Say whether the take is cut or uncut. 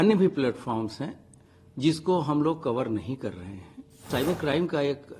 cut